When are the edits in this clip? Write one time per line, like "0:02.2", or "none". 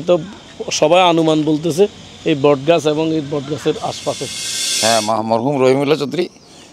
0:04.6

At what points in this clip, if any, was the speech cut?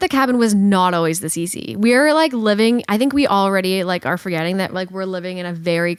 none

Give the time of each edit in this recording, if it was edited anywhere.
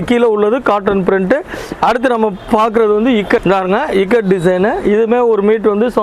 0:03.4

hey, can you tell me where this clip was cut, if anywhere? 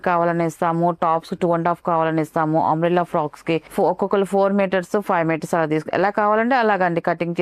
none

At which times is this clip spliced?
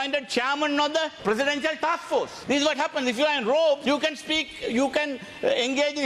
0:01.1
0:02.3
0:03.8

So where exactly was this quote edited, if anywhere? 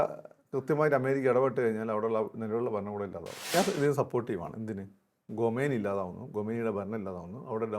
0:03.5

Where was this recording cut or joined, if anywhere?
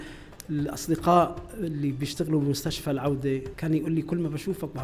0:03.5

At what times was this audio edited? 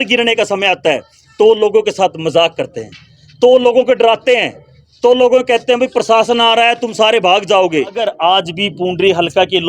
0:08.0

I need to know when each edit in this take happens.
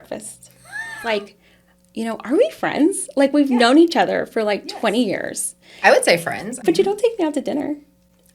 0:01.0
0:06.6

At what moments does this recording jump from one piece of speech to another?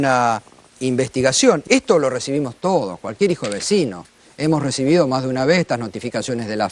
0:01.6

